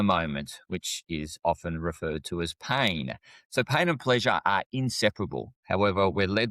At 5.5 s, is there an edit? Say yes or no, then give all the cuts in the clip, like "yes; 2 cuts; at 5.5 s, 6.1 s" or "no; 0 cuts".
yes; 1 cut; at 5.5 s